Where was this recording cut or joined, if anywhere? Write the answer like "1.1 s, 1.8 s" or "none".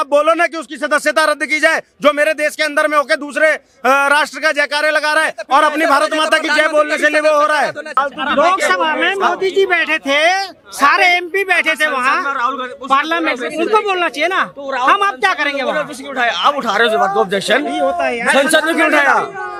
none

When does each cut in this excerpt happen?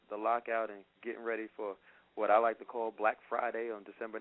2.0 s

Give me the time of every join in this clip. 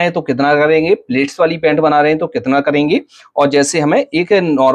none

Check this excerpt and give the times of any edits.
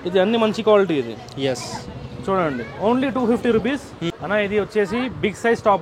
4.0 s

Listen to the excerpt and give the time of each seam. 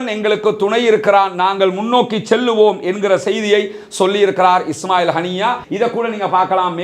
5.6 s

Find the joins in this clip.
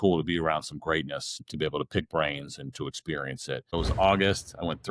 1.4 s, 3.7 s

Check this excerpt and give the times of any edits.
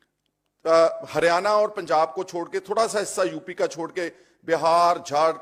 none

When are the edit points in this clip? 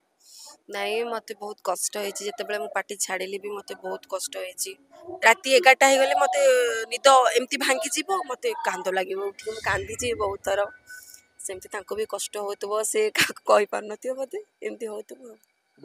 5.1 s

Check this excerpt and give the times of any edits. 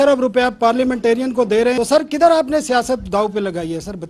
1.8 s

